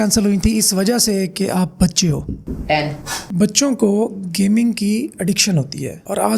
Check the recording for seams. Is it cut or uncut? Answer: cut